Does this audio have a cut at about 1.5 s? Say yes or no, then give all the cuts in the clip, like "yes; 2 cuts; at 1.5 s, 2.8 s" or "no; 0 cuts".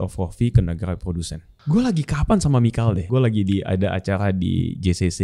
yes; 2 cuts; at 1.5 s, 3.0 s